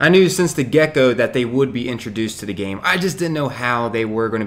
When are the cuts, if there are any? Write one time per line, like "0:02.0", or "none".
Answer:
none